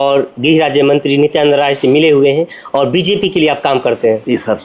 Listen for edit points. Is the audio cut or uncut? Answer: uncut